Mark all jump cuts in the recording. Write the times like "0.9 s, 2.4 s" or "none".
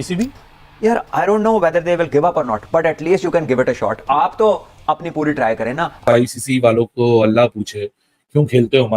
5.9 s